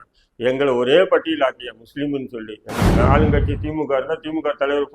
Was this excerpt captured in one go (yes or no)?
no